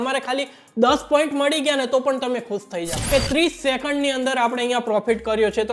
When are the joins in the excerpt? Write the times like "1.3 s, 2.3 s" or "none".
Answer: 3.0 s